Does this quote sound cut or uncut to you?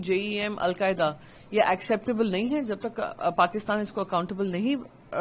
uncut